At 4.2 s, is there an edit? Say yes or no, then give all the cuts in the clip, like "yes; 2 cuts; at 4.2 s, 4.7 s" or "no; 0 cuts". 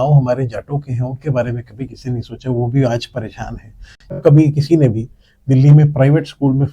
yes; 1 cut; at 4.2 s